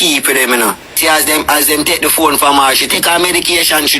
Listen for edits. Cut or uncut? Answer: cut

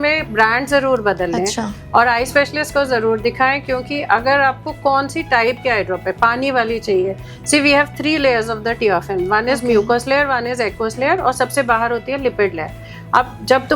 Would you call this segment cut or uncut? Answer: uncut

